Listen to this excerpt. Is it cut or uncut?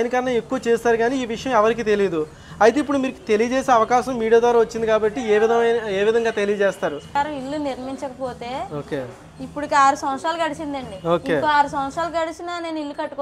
cut